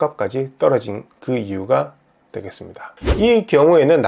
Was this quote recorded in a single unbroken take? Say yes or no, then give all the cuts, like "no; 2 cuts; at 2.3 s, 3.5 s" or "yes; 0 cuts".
no; 1 cut; at 2.9 s